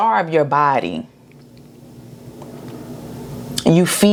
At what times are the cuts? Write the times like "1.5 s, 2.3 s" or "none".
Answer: none